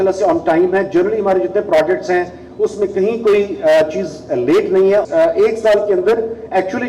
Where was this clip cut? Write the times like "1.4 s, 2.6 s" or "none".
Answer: 5.1 s